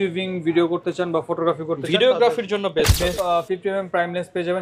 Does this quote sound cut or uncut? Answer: cut